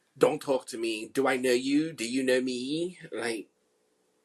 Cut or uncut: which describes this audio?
uncut